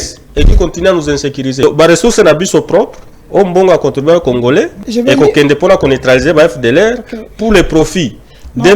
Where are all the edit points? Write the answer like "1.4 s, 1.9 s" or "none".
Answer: 1.6 s, 4.8 s